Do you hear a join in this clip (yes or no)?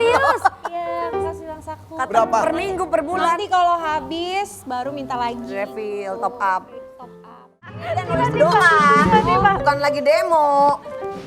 yes